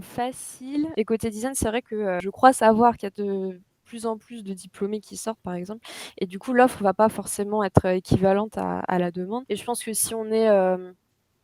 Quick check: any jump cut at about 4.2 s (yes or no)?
no